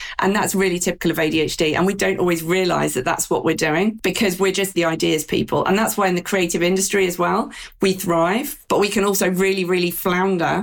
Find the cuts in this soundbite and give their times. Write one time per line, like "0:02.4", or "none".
0:02.0
0:04.5
0:08.5